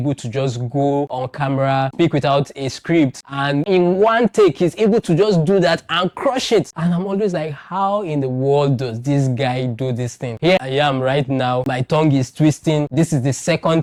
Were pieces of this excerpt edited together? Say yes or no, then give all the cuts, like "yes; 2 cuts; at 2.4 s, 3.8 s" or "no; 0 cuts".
no; 0 cuts